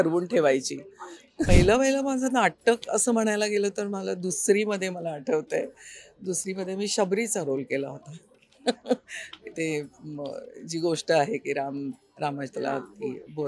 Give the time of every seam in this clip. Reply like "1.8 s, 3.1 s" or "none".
1.5 s